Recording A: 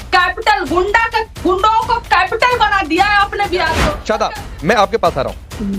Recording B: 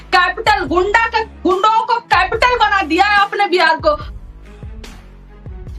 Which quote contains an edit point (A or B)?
A